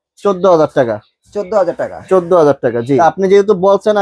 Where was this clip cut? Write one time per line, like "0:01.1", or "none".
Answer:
0:03.0